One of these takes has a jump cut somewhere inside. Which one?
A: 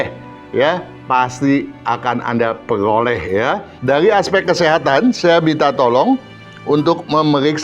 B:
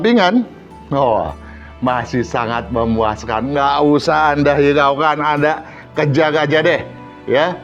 A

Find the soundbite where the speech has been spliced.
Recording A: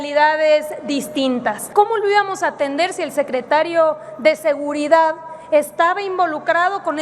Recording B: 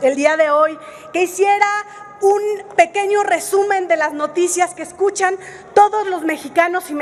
A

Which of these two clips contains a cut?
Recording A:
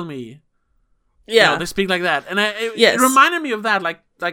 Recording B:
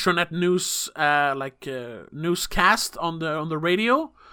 B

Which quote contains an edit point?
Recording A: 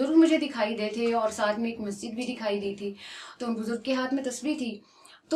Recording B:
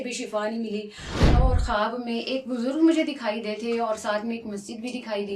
B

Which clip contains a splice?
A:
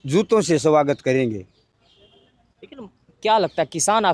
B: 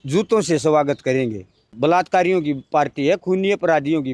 B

